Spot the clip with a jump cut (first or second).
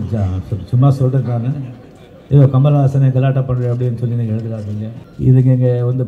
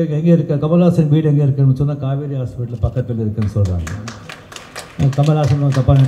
first